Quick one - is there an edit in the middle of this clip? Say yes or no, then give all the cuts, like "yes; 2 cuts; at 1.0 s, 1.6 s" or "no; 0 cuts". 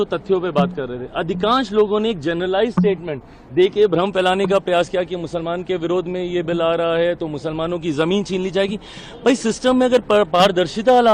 no; 0 cuts